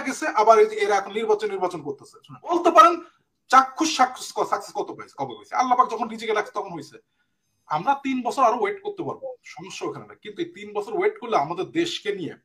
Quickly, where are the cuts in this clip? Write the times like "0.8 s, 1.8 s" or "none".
2.5 s